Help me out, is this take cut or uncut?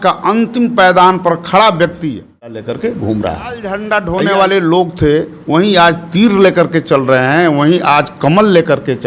cut